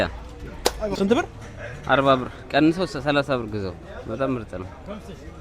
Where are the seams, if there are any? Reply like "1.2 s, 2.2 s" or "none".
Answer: 0.9 s